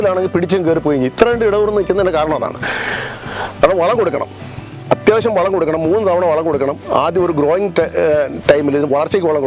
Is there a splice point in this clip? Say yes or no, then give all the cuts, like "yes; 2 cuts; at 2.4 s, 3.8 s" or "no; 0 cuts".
no; 0 cuts